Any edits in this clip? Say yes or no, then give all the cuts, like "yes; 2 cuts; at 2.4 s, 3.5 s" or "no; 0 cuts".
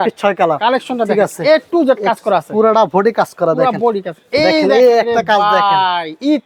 no; 0 cuts